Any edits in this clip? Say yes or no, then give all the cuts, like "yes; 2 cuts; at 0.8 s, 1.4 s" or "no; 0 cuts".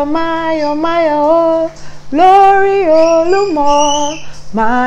no; 0 cuts